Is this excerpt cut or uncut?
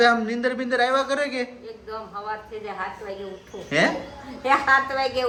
uncut